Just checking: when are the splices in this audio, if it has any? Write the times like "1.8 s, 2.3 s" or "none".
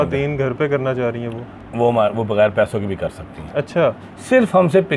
1.6 s